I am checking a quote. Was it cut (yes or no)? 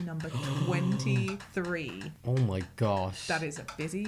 no